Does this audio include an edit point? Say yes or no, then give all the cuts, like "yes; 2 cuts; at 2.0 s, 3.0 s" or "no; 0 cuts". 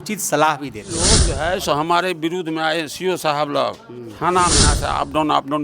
yes; 2 cuts; at 1.3 s, 4.8 s